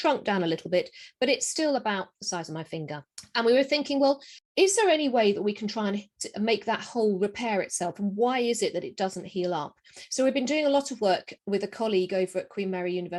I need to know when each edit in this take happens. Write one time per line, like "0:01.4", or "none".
none